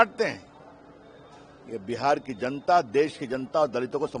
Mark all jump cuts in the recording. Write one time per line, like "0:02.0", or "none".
none